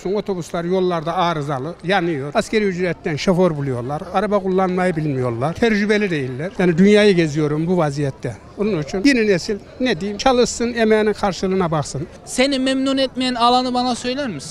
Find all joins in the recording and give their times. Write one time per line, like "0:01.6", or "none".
0:06.4
0:12.0